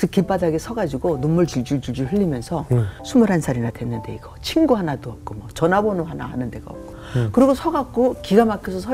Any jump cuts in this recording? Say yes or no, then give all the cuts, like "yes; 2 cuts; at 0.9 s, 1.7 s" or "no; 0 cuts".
yes; 2 cuts; at 2.9 s, 7.0 s